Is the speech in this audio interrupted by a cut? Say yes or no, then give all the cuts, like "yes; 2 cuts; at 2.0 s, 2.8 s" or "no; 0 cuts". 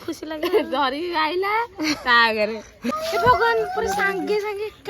yes; 1 cut; at 2.9 s